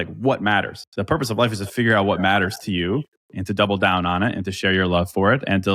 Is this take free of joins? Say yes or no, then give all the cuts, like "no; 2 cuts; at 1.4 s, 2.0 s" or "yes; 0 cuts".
yes; 0 cuts